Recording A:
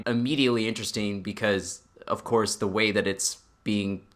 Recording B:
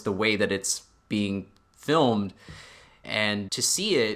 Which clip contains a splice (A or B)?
B